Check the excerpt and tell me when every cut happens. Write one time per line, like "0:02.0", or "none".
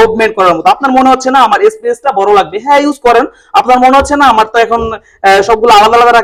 none